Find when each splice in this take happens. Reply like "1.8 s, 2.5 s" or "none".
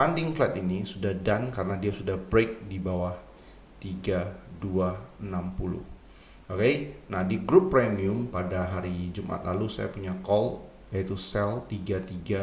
none